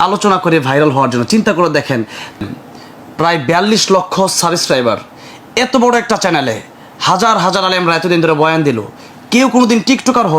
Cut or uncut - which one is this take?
cut